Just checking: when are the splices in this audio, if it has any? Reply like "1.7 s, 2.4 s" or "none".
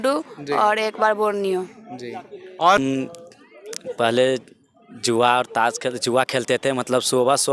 2.8 s